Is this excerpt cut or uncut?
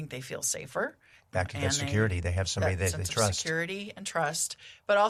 uncut